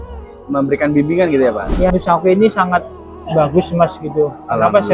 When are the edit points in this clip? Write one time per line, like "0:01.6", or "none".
0:01.9